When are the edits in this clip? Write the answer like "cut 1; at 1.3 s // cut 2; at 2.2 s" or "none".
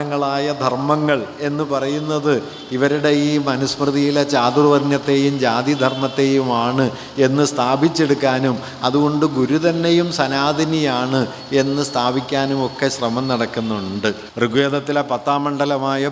cut 1; at 14.3 s

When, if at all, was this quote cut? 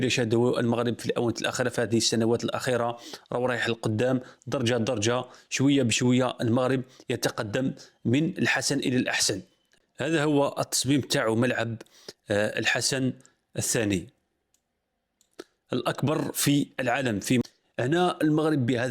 cut 1; at 9.7 s // cut 2; at 17.4 s

